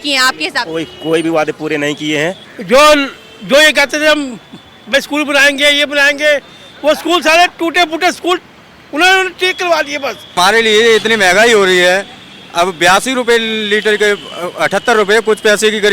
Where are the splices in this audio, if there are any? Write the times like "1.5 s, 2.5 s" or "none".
2.5 s, 10.4 s